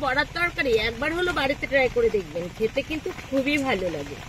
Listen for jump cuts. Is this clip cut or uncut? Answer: uncut